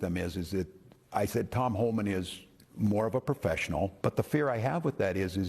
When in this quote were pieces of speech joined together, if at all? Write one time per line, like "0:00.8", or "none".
0:03.9